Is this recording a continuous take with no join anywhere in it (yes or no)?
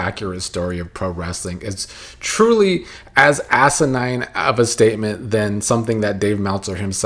yes